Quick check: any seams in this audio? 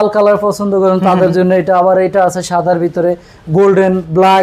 no; 0 cuts

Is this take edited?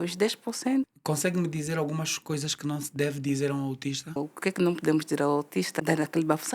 yes; 3 cuts; at 0.9 s, 4.3 s, 5.7 s

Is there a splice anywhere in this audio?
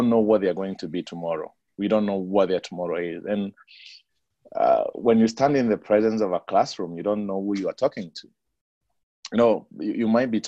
no; 0 cuts

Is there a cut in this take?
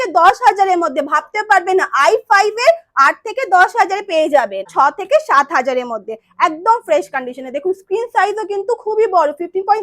yes; 1 cut; at 4.7 s

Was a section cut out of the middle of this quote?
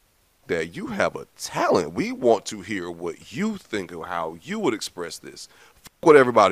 no; 0 cuts

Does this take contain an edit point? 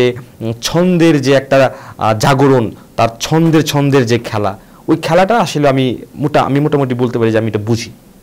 no; 0 cuts

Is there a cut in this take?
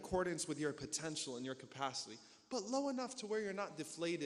no; 0 cuts

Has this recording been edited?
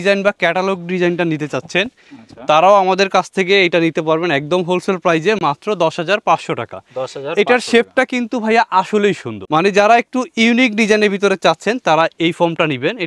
no; 0 cuts

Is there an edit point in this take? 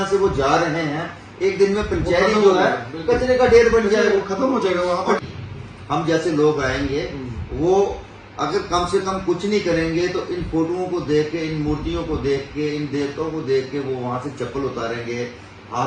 yes; 1 cut; at 5.2 s

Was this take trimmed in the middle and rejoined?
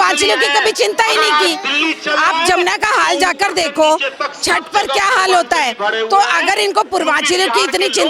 no; 0 cuts

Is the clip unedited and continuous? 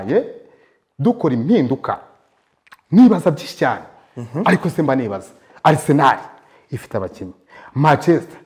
yes; 0 cuts

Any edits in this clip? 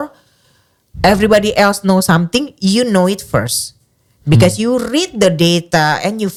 no; 0 cuts

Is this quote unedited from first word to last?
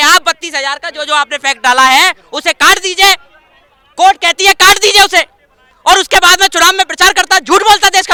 yes; 0 cuts

